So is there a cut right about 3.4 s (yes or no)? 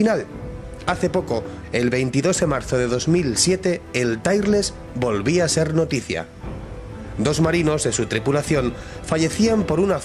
yes